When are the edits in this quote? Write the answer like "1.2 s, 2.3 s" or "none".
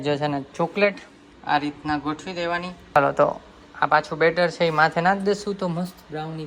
none